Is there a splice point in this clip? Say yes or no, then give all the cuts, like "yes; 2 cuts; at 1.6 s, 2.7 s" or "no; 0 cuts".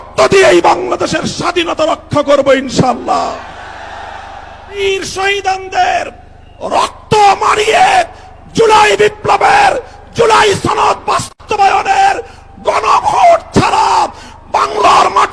yes; 1 cut; at 4.3 s